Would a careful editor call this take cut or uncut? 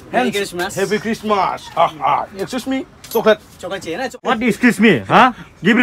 cut